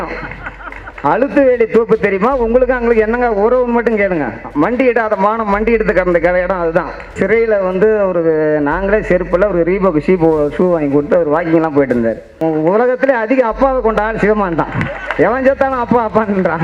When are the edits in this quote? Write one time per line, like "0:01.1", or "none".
0:07.2
0:12.4